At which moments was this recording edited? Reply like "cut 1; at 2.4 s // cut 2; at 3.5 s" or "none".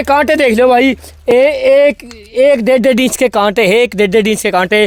none